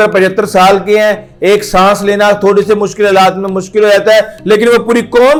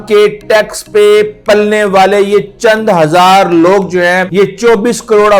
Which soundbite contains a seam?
second; 1 cut; at 4.3 s

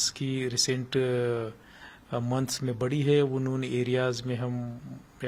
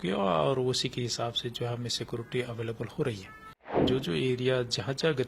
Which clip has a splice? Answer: second; 1 cut; at 3.8 s

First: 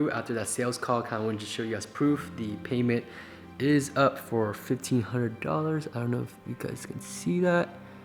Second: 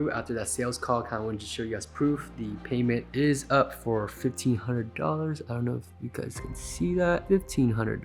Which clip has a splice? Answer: second; 2 cuts; at 3.1 s, 7.2 s

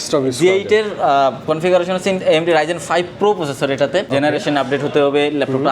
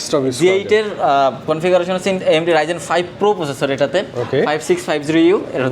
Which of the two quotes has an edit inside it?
first; 1 cut; at 4.1 s

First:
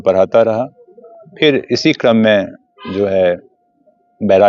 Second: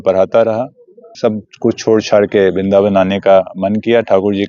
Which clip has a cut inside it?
second; 1 cut; at 1.1 s

